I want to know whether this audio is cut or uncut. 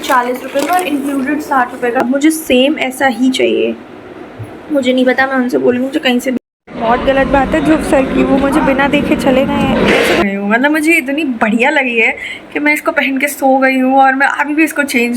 cut